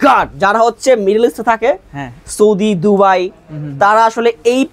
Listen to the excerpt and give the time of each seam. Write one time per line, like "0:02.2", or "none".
none